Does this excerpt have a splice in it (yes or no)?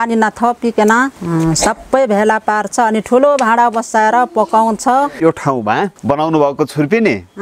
yes